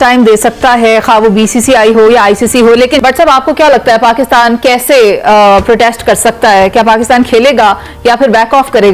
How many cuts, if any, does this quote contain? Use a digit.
1